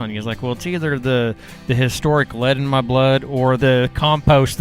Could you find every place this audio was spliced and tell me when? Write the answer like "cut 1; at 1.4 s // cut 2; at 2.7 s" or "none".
cut 1; at 3.6 s